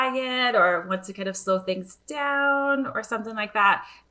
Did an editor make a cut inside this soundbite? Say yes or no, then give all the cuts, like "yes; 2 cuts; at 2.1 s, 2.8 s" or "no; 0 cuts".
no; 0 cuts